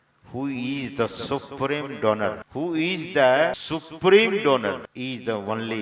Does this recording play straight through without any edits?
no; 3 cuts; at 2.4 s, 3.6 s, 4.9 s

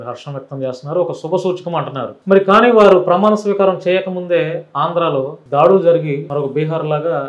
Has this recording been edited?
yes; 3 cuts; at 2.1 s, 5.4 s, 6.2 s

